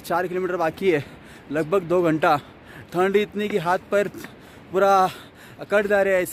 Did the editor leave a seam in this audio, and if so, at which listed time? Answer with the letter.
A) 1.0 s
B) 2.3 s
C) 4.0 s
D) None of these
D